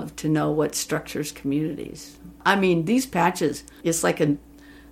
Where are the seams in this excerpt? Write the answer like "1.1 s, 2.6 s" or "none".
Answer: 2.4 s, 3.7 s